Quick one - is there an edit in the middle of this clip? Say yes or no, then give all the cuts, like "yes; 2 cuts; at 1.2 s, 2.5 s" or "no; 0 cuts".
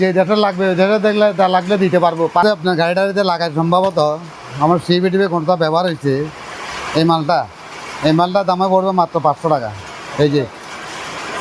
yes; 1 cut; at 2.4 s